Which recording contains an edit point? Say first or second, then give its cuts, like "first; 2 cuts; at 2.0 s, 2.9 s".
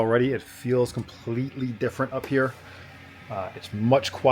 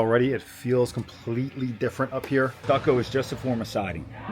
second; 1 cut; at 2.6 s